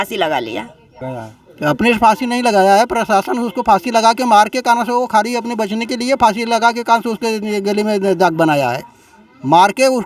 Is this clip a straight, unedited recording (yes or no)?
no